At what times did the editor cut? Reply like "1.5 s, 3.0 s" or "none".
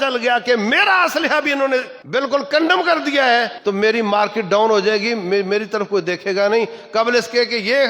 2.0 s, 3.5 s